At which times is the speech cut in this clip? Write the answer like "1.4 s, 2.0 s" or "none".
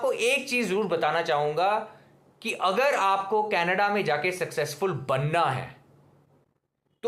none